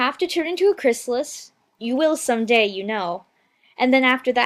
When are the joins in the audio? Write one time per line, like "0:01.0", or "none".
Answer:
0:01.7